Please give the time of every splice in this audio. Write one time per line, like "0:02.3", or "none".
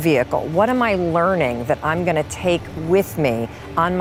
none